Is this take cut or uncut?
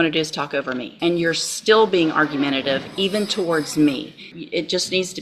cut